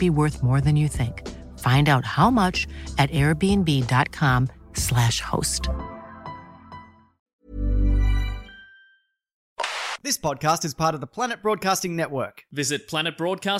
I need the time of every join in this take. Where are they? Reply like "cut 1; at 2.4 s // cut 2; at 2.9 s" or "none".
cut 1; at 9.8 s